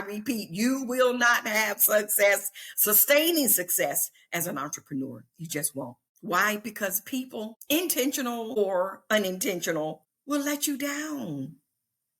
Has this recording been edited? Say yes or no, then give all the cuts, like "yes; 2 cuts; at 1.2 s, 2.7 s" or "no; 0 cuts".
yes; 4 cuts; at 6.1 s, 7.6 s, 8.6 s, 10.1 s